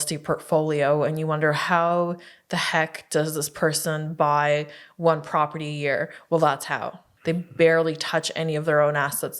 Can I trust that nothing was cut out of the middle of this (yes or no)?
no